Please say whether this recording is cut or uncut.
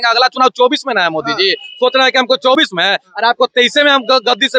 uncut